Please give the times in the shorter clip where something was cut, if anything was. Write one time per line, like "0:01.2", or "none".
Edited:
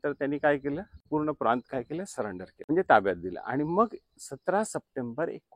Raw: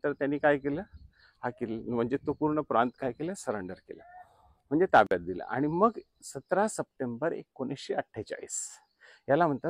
0:01.1
0:02.5